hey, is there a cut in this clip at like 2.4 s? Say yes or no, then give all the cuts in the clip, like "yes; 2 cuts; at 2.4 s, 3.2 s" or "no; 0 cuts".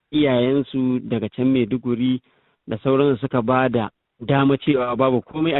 no; 0 cuts